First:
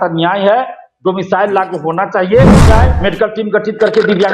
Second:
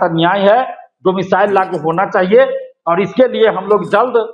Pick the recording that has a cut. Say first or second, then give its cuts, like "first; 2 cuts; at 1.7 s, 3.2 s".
first; 1 cut; at 2.6 s